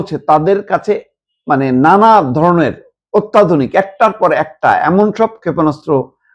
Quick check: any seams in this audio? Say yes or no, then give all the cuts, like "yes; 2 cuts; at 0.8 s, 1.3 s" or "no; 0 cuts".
no; 0 cuts